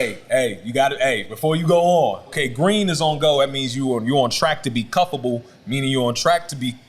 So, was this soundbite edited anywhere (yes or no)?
yes